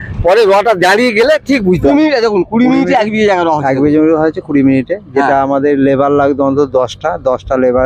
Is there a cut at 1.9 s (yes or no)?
yes